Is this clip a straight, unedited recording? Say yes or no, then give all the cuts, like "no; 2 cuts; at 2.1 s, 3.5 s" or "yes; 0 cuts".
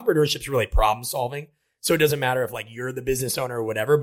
yes; 0 cuts